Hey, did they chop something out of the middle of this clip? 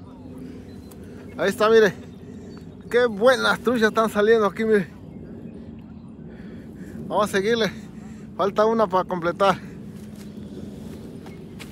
no; 0 cuts

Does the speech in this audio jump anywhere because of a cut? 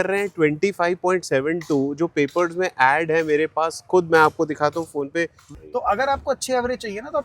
yes; 1 cut; at 5.5 s

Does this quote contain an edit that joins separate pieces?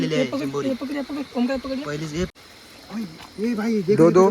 yes; 1 cut; at 2.3 s

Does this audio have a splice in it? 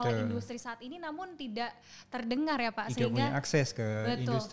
no; 0 cuts

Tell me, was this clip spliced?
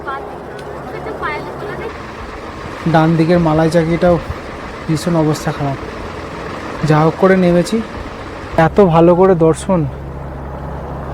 yes; 2 cuts; at 1.9 s, 8.6 s

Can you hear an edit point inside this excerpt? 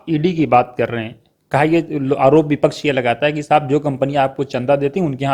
no; 0 cuts

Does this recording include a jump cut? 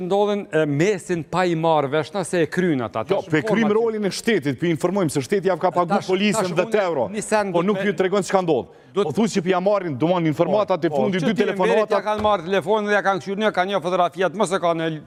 no; 0 cuts

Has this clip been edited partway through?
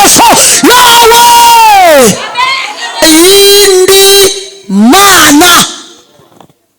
yes; 1 cut; at 3.0 s

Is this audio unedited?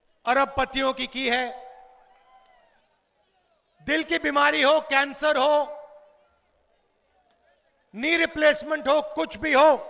no; 1 cut; at 2.8 s

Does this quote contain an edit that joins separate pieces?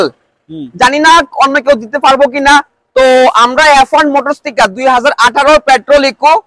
no; 0 cuts

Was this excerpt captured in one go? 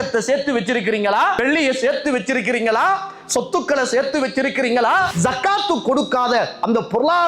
no; 2 cuts; at 1.4 s, 5.1 s

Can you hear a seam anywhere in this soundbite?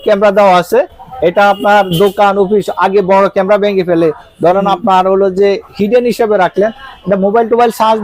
no; 0 cuts

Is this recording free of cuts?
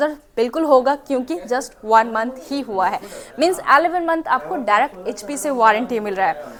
yes; 0 cuts

